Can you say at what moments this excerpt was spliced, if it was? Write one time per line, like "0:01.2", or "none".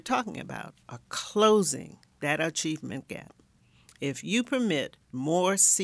none